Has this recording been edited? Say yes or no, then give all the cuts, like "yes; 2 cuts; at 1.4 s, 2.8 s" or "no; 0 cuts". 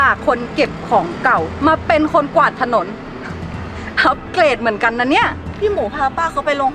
yes; 1 cut; at 5.5 s